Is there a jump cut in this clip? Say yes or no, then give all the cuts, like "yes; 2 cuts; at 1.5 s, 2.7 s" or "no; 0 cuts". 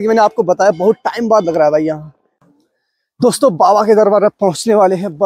yes; 1 cut; at 2.5 s